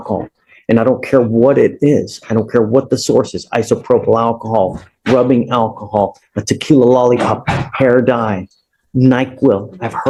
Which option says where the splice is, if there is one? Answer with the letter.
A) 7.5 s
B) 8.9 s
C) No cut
C